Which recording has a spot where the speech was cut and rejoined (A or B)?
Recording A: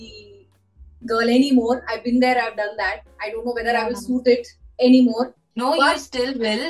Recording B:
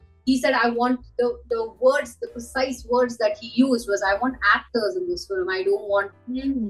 A